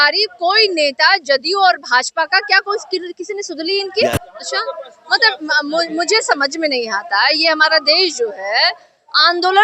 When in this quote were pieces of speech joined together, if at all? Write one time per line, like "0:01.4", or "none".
0:04.3